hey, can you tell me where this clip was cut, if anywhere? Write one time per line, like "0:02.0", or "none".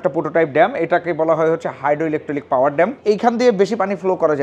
0:03.0